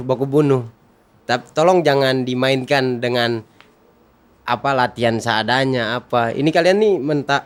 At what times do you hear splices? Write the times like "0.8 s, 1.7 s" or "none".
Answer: none